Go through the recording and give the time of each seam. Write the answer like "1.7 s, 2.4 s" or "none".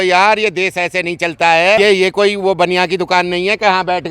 1.8 s

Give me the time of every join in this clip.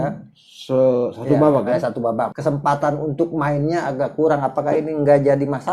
2.3 s

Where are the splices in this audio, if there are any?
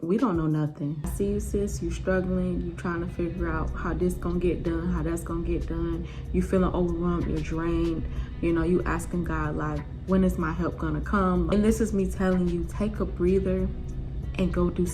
1.1 s, 11.5 s

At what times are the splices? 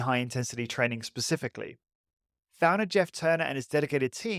none

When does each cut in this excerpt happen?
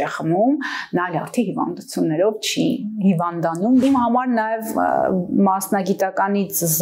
3.8 s

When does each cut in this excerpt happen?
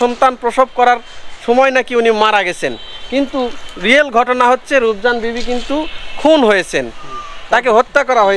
none

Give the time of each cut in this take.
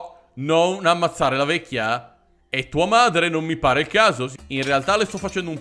4.3 s

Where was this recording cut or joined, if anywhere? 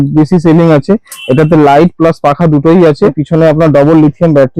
3.2 s

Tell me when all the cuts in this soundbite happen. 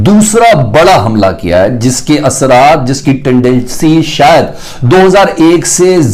none

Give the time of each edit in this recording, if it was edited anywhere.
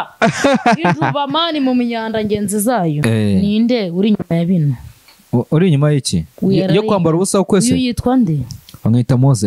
3.0 s

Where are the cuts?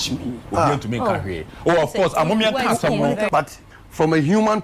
3.3 s

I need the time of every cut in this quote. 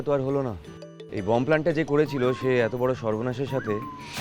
1.1 s

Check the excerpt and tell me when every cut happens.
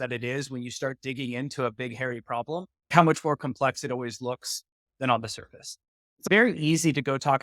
2.9 s, 6.3 s

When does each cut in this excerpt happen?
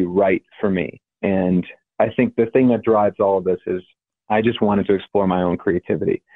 1.0 s, 1.8 s

